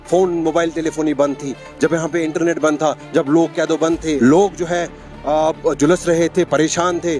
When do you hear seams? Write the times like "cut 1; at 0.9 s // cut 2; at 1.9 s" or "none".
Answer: cut 1; at 4.2 s